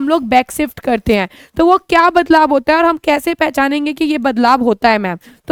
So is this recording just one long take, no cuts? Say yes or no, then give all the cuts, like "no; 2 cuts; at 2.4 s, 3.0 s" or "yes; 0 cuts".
yes; 0 cuts